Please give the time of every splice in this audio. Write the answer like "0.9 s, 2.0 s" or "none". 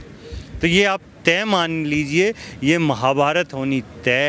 none